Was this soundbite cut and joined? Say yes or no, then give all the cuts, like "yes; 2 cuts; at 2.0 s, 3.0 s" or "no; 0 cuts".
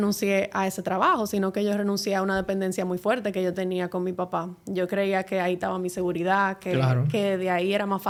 no; 0 cuts